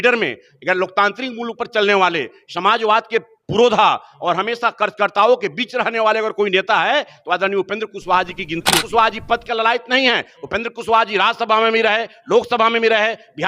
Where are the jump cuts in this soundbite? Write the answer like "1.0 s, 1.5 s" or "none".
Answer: 8.8 s

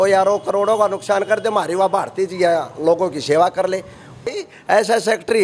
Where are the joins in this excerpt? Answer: 4.4 s

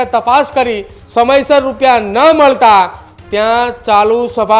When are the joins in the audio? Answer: 1.0 s

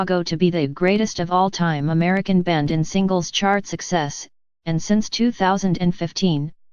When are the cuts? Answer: none

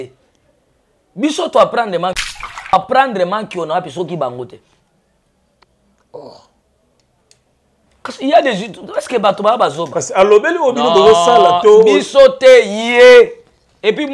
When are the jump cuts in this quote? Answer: 2.7 s

